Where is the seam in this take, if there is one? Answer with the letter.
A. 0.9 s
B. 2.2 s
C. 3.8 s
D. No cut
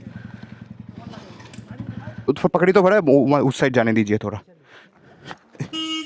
B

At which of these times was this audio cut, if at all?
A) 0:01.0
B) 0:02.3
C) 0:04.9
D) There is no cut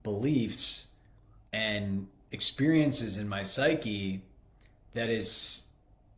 D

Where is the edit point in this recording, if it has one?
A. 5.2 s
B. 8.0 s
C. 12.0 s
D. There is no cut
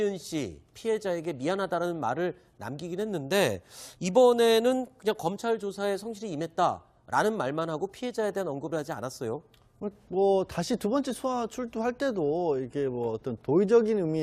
A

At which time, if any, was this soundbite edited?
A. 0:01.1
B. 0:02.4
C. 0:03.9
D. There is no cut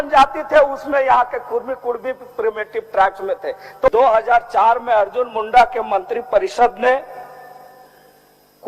C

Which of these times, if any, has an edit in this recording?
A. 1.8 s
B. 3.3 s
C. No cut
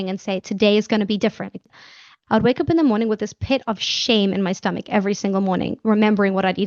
A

